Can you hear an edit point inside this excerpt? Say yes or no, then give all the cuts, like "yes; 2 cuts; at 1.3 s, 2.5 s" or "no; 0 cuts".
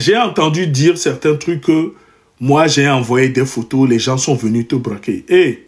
no; 0 cuts